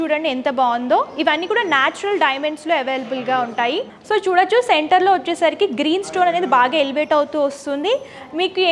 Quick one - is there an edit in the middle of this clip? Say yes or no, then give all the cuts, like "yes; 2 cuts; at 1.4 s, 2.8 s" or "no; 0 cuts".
no; 0 cuts